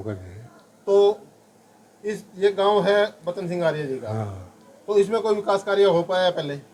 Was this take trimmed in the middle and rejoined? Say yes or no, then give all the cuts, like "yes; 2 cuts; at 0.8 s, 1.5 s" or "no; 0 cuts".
no; 0 cuts